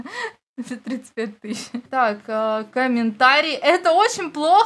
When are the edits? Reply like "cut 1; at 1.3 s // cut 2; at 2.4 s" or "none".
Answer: cut 1; at 1.8 s